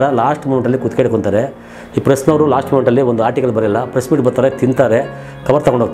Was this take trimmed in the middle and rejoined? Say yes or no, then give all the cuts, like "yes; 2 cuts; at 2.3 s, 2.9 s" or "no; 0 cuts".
no; 0 cuts